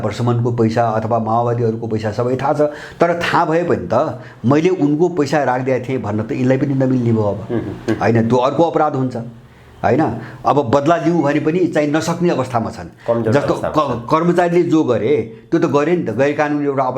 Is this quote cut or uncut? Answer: uncut